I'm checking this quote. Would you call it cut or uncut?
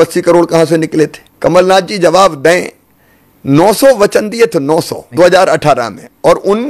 cut